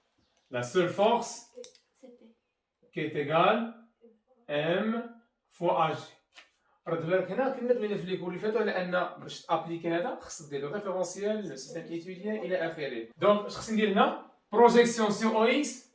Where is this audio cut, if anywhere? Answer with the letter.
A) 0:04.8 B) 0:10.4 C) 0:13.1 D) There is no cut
C